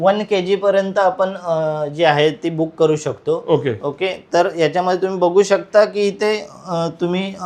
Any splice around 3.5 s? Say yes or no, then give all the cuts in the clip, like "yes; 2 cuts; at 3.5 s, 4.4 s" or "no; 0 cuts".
no; 0 cuts